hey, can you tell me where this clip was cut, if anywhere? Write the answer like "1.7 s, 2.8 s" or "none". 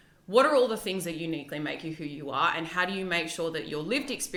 none

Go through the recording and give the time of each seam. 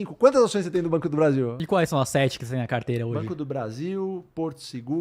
1.6 s

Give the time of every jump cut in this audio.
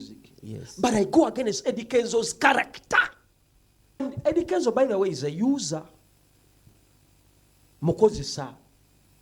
4.0 s

